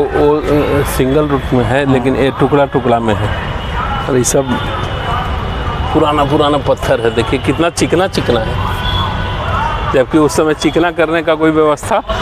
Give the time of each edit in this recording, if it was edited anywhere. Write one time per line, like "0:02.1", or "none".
none